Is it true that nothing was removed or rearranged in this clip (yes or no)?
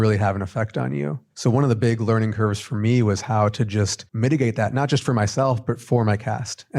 no